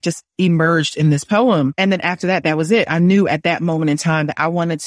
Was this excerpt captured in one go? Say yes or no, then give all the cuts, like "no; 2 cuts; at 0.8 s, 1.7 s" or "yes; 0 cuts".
yes; 0 cuts